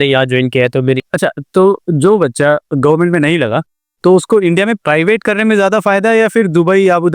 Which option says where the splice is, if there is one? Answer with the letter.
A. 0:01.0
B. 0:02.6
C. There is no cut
A